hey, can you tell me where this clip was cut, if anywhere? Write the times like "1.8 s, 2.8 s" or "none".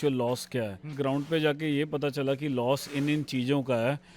0.9 s